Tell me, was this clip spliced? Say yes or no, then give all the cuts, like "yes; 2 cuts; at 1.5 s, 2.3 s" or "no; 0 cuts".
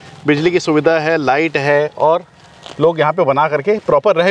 no; 0 cuts